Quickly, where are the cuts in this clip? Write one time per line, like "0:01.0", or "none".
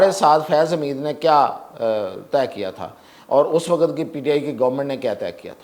none